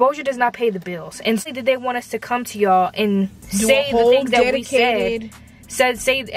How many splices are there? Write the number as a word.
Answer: one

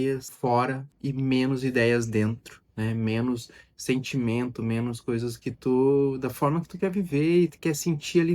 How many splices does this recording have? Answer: zero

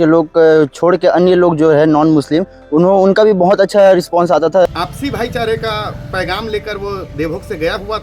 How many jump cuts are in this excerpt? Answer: one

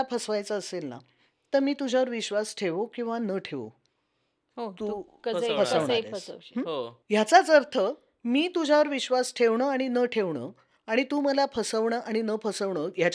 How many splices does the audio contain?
zero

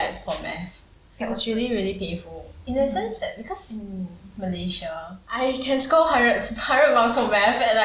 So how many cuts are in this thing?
three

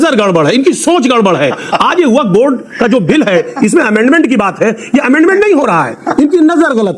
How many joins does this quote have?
one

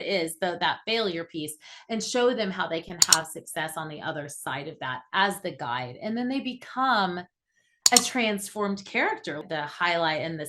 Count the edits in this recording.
one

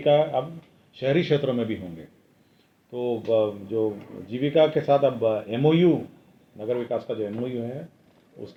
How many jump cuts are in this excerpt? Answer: zero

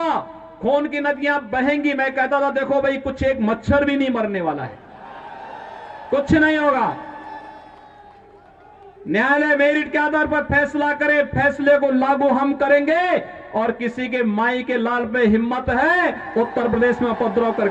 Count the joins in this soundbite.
zero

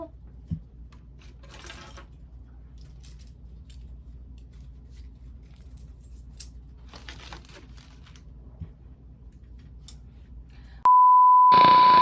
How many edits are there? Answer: zero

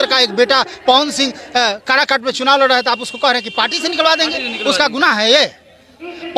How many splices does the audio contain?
zero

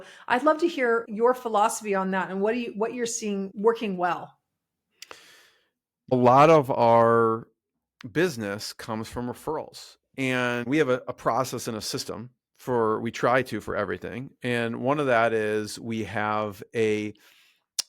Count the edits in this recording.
four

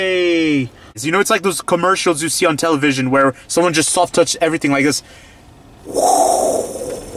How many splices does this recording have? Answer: one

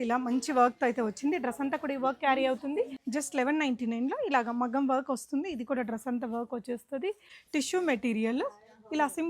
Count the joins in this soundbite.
two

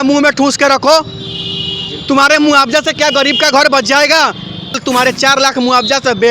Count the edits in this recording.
one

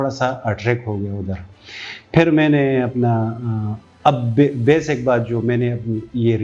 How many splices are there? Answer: zero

